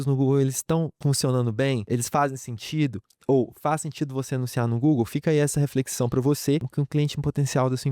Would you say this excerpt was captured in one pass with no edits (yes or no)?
no